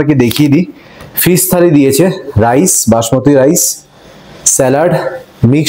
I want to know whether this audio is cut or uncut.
uncut